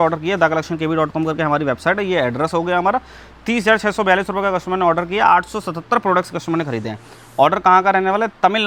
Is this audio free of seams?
yes; 0 cuts

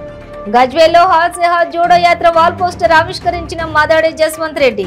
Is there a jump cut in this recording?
no; 0 cuts

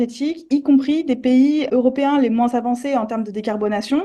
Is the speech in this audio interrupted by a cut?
yes; 1 cut; at 1.7 s

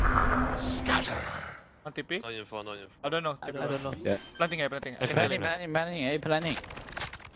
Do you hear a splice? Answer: no; 0 cuts

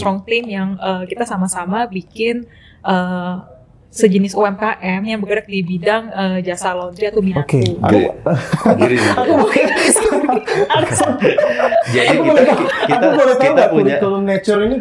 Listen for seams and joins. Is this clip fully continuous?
no; 1 cut; at 7.3 s

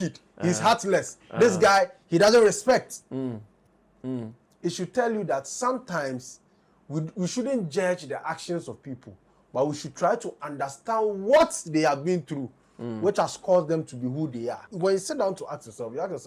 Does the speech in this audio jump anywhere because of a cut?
yes; 1 cut; at 14.7 s

